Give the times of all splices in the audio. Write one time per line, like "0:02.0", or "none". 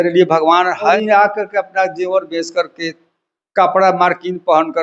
0:00.9